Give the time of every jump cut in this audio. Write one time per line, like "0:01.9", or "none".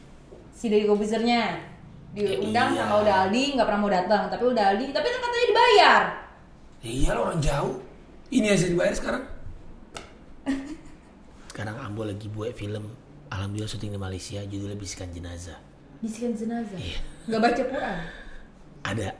0:11.4